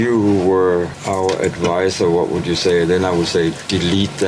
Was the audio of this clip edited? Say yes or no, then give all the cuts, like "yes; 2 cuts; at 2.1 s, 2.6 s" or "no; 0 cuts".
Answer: yes; 1 cut; at 1.0 s